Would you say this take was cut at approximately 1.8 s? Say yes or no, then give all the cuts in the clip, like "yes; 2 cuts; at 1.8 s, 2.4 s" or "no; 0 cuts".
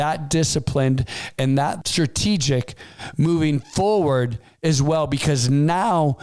yes; 1 cut; at 1.8 s